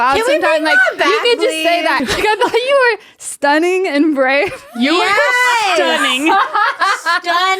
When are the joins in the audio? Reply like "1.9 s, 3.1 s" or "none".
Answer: 2.0 s